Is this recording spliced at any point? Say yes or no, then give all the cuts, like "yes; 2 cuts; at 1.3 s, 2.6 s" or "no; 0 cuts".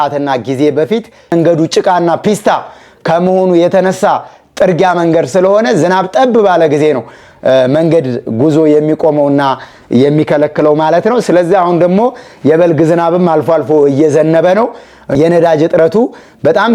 yes; 2 cuts; at 1.3 s, 15.1 s